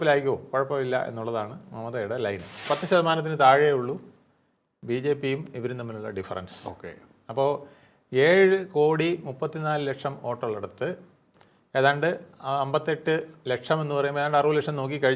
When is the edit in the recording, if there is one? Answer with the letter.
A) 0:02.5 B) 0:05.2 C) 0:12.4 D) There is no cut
A